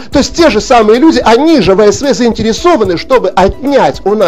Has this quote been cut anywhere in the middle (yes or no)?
no